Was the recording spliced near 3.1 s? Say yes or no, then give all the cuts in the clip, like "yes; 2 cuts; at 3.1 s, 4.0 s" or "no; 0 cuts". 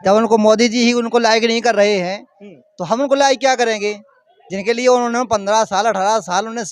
no; 0 cuts